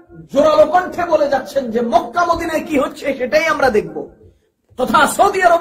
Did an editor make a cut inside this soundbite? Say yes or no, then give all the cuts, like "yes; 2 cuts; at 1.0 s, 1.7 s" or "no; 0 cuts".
no; 0 cuts